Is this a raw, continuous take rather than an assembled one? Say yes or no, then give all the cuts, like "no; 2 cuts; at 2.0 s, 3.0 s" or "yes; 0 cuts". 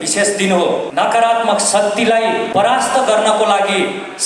no; 2 cuts; at 0.9 s, 2.5 s